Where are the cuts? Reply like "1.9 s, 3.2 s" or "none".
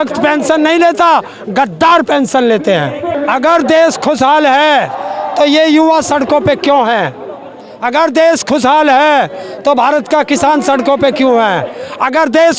3.1 s